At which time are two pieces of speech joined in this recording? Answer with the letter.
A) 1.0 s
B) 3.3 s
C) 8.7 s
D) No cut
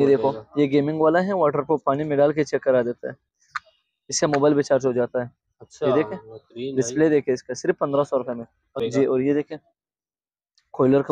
C